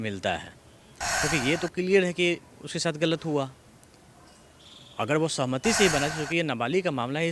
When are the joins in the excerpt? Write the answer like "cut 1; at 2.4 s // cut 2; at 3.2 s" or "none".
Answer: none